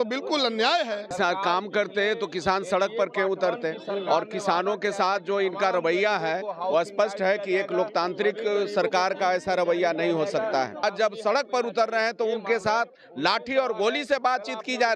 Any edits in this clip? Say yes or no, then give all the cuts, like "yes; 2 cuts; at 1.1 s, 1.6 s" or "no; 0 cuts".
yes; 2 cuts; at 1.1 s, 10.8 s